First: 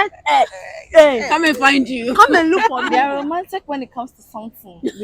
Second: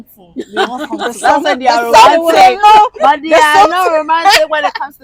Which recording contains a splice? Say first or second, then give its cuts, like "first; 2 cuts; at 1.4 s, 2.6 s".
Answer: first; 1 cut; at 2.8 s